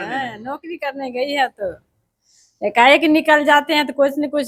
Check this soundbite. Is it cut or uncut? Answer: uncut